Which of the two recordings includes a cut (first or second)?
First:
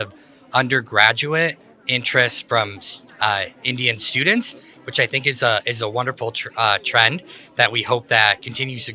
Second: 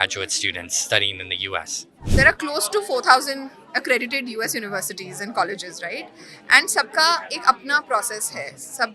second